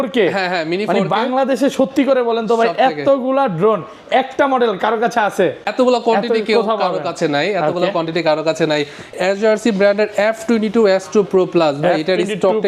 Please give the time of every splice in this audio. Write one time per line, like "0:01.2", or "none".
0:05.7
0:09.1

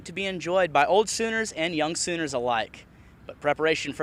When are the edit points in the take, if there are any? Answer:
none

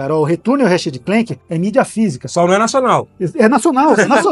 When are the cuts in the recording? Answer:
0:01.4

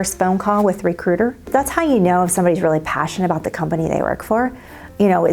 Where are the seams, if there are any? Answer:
0:01.5

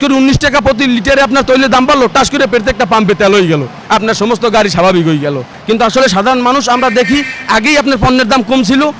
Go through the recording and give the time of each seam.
0:05.5

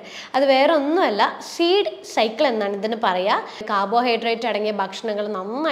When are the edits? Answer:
0:03.7

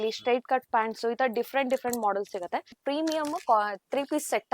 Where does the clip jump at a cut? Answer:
0:02.7

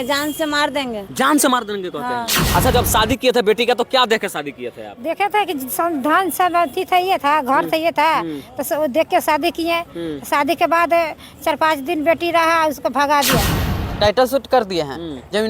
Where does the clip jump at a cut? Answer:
0:02.4
0:13.6

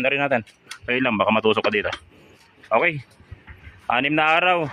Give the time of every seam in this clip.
none

